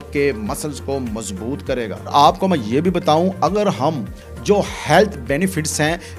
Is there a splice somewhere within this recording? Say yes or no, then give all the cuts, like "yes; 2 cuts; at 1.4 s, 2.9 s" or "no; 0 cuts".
no; 0 cuts